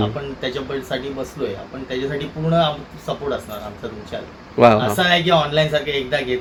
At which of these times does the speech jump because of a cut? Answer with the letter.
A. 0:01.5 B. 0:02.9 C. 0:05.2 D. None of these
D